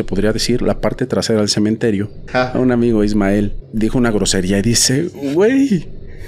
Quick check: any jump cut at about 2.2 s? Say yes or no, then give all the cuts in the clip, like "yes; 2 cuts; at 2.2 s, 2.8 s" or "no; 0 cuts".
yes; 2 cuts; at 2.2 s, 3.6 s